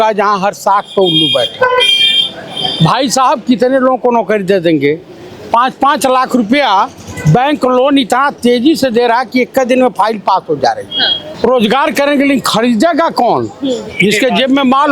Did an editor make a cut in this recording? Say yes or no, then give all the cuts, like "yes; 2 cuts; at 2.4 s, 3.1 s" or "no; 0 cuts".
no; 0 cuts